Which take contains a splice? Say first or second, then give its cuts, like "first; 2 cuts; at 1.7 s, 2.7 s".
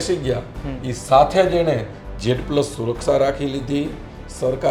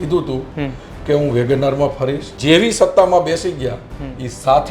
second; 1 cut; at 2.3 s